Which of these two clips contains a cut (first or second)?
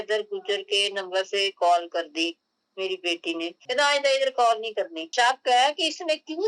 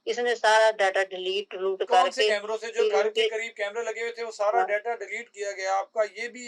first